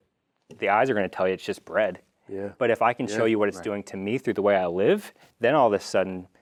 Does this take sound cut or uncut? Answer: uncut